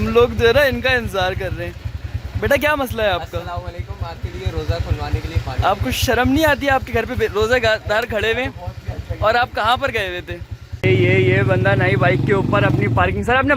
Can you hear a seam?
no; 0 cuts

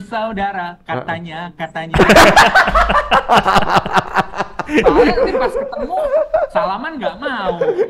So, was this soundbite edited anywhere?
no; 0 cuts

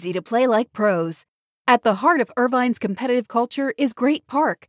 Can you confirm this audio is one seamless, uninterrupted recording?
yes; 0 cuts

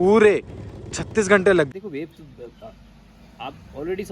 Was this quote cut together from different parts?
yes; 1 cut; at 1.7 s

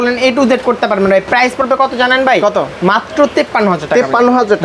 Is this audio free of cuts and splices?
yes; 0 cuts

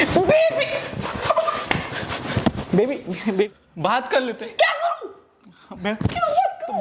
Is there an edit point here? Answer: yes; 1 cut; at 3.5 s

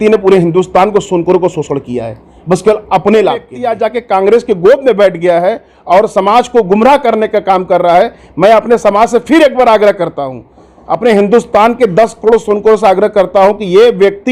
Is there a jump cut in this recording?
yes; 1 cut; at 3.6 s

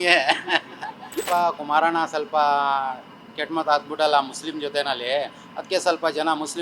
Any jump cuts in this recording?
yes; 1 cut; at 1.2 s

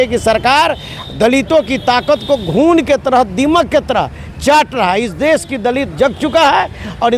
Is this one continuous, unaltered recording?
yes; 0 cuts

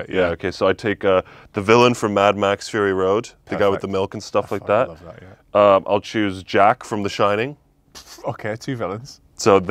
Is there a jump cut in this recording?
no; 0 cuts

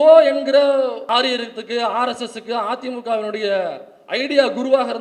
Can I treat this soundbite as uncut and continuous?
no; 1 cut; at 1.0 s

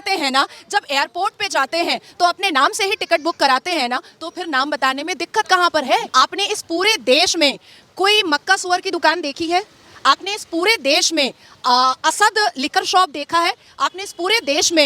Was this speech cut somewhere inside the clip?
yes; 1 cut; at 6.1 s

